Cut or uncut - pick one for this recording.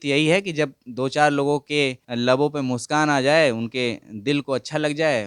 cut